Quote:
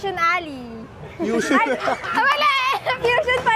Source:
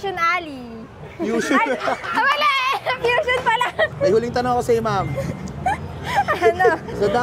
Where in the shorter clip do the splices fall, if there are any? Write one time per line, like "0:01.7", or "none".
none